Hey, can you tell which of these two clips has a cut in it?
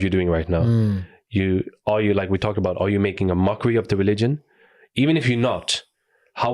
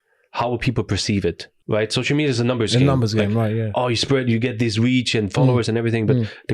second; 1 cut; at 1.5 s

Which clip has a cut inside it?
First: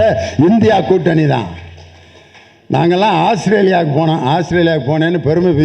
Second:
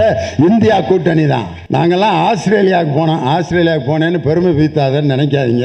second; 1 cut; at 1.6 s

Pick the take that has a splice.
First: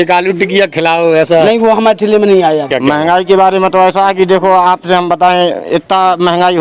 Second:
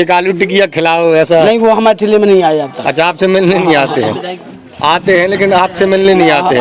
first; 1 cut; at 2.7 s

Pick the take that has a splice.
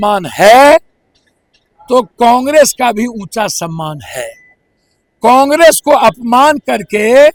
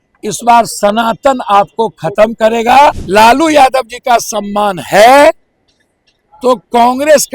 second; 1 cut; at 3.0 s

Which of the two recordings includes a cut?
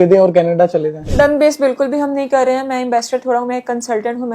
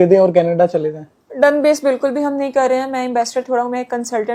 first; 1 cut; at 1.0 s

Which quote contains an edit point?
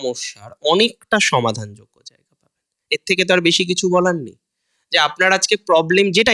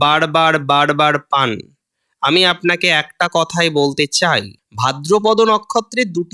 second; 1 cut; at 4.6 s

